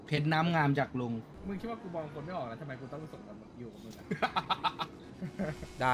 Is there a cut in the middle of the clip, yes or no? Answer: yes